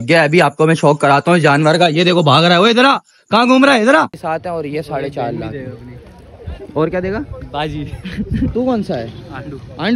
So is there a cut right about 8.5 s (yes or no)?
yes